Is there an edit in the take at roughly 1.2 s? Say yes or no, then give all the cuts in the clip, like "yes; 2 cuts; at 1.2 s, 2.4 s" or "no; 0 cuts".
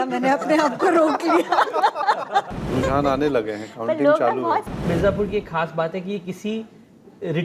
no; 2 cuts; at 2.5 s, 4.8 s